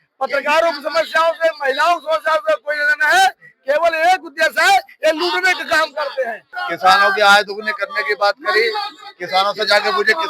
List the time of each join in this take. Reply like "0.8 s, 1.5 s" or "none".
6.5 s